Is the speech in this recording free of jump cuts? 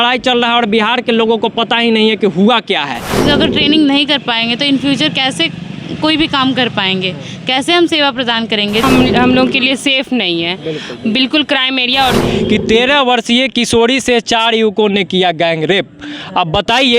no; 3 cuts; at 3.2 s, 8.8 s, 12.2 s

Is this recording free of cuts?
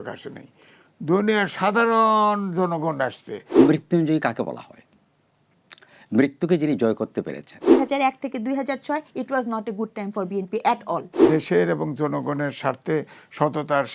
no; 3 cuts; at 3.6 s, 7.6 s, 11.2 s

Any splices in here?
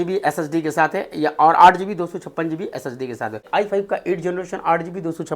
yes; 1 cut; at 3.4 s

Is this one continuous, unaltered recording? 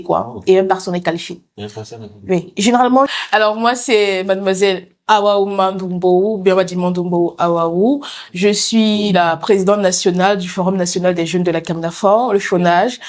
no; 1 cut; at 3.1 s

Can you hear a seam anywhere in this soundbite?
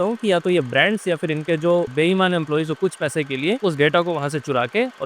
yes; 2 cuts; at 1.9 s, 3.6 s

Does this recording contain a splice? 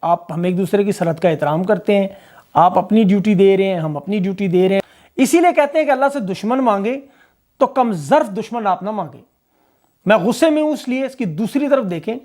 yes; 1 cut; at 4.8 s

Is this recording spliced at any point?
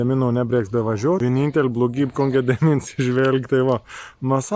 yes; 1 cut; at 1.2 s

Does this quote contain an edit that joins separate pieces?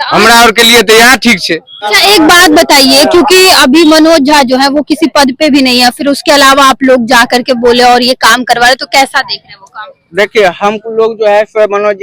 yes; 1 cut; at 1.8 s

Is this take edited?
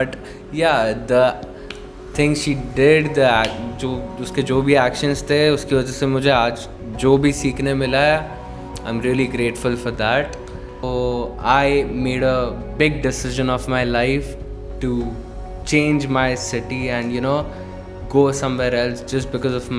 yes; 1 cut; at 10.8 s

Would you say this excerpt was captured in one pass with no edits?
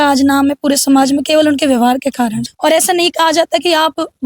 no; 1 cut; at 2.4 s

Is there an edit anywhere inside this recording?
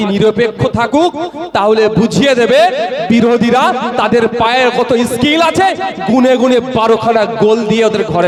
no; 0 cuts

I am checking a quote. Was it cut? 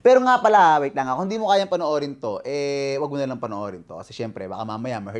no; 0 cuts

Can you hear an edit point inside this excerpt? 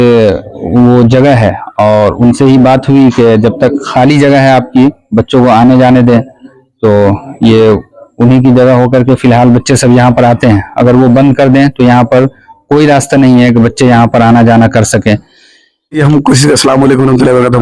yes; 1 cut; at 16.0 s

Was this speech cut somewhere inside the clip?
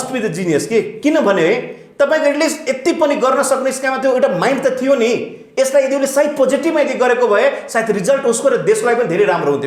no; 0 cuts

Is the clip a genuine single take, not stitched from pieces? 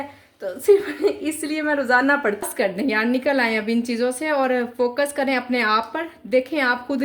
no; 1 cut; at 2.5 s

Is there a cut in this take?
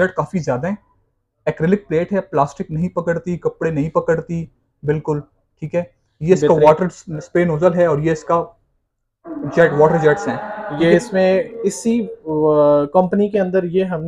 no; 0 cuts

